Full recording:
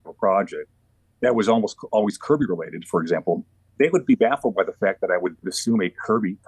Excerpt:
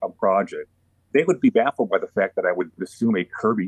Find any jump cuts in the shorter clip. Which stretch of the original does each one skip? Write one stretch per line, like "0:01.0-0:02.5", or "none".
0:00.9-0:03.6